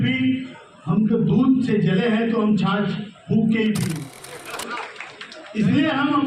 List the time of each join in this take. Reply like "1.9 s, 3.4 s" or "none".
3.9 s